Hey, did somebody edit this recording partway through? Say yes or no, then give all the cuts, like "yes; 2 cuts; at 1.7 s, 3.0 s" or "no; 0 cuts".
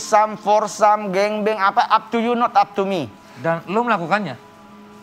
no; 0 cuts